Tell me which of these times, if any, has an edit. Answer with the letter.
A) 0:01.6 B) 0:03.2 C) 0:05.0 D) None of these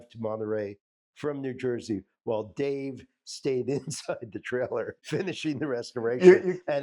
C